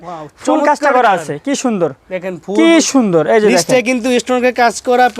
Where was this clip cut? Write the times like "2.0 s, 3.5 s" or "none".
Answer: none